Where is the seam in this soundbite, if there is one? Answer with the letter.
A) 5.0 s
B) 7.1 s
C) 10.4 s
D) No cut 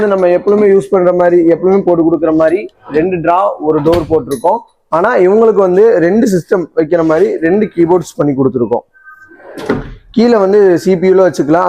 D